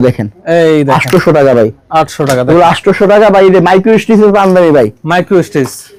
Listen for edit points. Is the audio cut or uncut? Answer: uncut